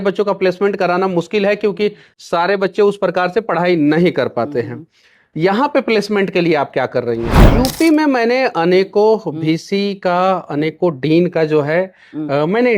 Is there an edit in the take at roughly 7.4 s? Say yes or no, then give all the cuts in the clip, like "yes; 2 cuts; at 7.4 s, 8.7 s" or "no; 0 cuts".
yes; 1 cut; at 7.4 s